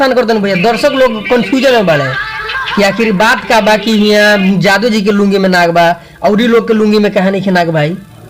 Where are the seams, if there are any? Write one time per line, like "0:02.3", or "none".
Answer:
none